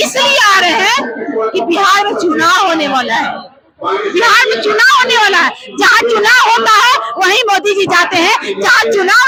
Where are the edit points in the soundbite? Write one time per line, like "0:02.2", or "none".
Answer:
none